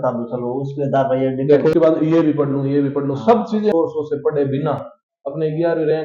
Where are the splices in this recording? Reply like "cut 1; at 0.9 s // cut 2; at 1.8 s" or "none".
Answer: cut 1; at 1.7 s // cut 2; at 3.7 s